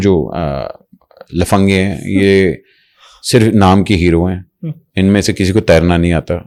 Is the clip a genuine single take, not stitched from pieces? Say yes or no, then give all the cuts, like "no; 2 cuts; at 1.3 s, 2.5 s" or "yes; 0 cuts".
yes; 0 cuts